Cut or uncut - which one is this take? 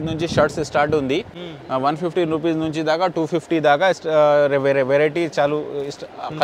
uncut